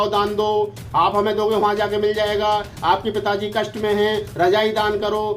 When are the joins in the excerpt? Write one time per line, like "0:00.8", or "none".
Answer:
none